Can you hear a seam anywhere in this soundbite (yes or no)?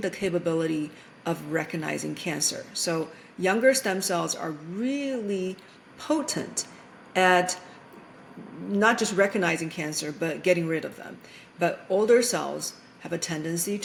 no